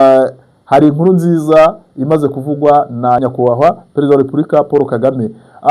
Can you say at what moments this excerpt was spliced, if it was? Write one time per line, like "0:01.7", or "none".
0:03.2